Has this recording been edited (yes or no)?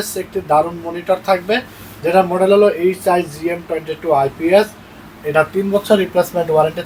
no